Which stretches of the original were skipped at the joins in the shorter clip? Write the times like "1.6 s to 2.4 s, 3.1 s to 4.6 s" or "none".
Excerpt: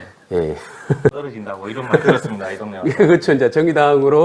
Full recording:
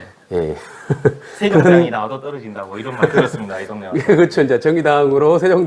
1.3 s to 2.4 s